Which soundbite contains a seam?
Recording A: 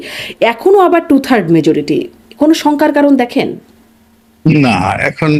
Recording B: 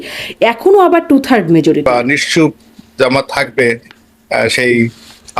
B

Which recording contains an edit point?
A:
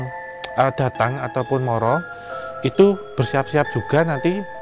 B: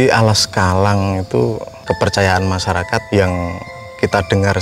B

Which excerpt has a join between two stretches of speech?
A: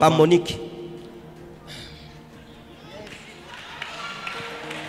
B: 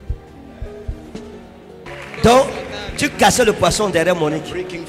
B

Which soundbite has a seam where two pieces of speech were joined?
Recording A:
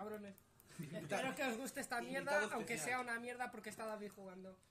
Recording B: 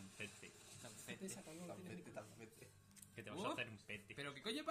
A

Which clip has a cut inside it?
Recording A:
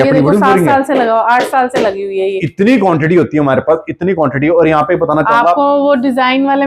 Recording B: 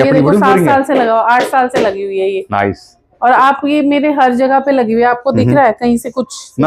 A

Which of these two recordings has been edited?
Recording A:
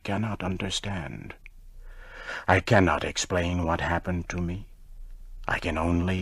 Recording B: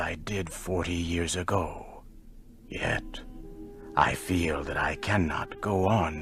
B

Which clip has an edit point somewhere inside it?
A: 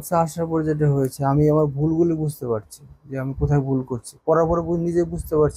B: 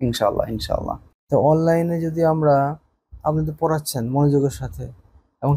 B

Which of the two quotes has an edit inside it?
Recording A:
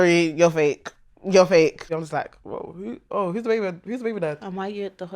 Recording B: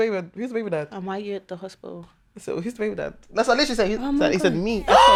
A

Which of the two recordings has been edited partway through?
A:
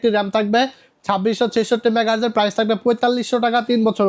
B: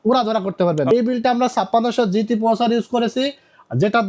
B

